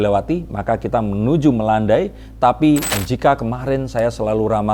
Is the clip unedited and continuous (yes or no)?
no